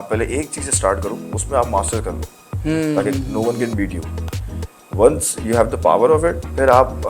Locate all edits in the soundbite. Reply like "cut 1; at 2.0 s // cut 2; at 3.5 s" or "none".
none